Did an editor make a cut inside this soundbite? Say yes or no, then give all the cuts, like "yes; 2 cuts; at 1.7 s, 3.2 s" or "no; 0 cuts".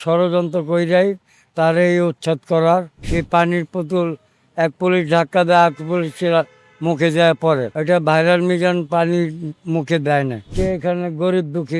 yes; 2 cuts; at 2.9 s, 10.5 s